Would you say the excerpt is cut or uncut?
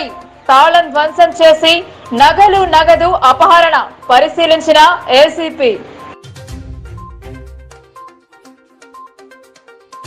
uncut